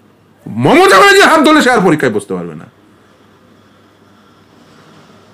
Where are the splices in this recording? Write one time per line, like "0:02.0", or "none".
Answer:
none